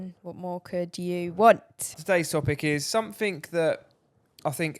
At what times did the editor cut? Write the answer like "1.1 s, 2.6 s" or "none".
2.0 s